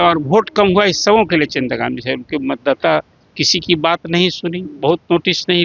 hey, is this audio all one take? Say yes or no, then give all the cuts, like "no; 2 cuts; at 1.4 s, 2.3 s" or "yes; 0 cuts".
yes; 0 cuts